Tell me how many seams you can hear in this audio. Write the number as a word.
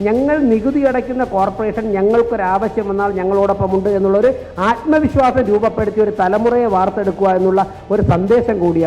zero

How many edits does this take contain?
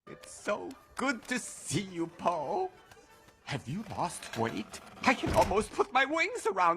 one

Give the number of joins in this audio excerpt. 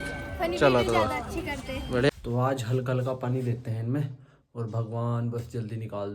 one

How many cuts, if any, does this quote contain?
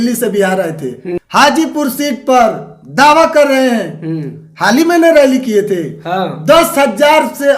one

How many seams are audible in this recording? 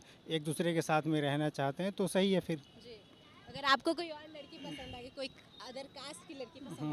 zero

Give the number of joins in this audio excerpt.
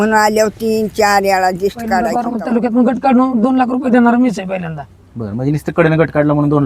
one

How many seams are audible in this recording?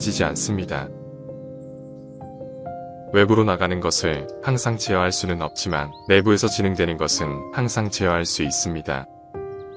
zero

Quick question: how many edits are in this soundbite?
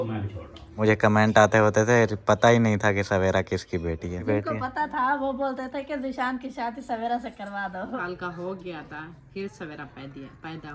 three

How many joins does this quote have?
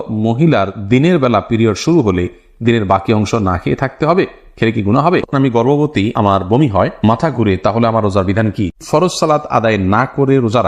two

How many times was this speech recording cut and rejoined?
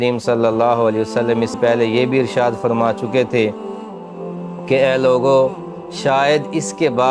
one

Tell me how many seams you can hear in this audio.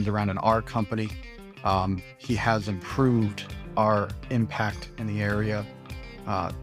zero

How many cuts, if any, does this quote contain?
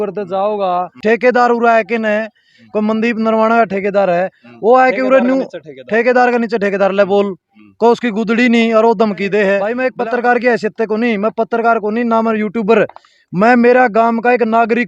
two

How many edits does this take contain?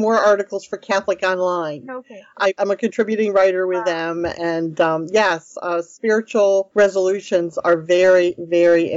two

